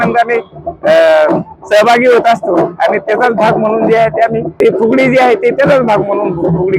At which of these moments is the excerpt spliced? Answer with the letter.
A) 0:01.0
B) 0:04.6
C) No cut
B